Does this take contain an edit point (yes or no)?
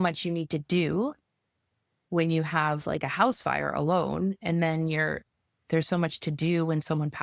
no